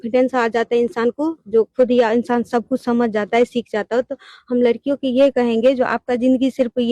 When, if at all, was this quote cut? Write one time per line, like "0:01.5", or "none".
0:00.9